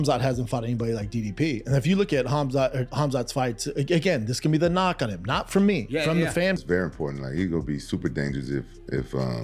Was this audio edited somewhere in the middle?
yes; 1 cut; at 6.6 s

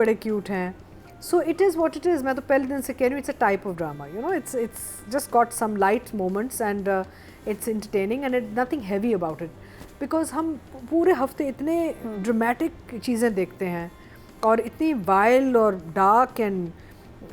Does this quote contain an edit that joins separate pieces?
no; 0 cuts

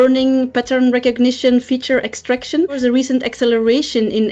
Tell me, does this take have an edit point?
yes; 1 cut; at 2.8 s

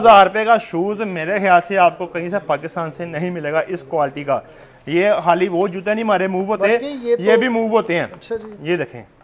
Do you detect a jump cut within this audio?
no; 0 cuts

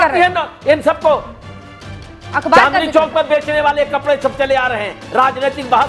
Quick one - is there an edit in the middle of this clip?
no; 0 cuts

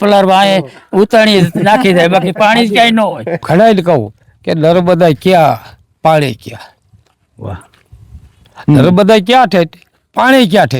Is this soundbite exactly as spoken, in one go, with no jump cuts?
no; 1 cut; at 3.4 s

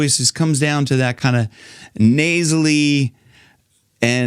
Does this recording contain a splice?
no; 0 cuts

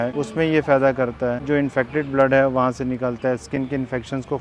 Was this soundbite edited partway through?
yes; 1 cut; at 1.4 s

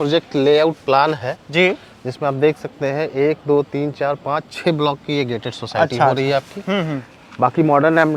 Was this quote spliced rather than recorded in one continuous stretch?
no; 0 cuts

